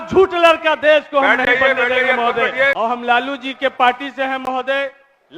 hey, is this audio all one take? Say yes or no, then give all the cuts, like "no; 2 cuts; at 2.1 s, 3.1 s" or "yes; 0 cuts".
no; 1 cut; at 2.7 s